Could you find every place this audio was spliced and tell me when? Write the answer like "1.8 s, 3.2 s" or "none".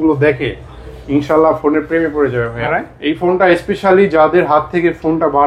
2.6 s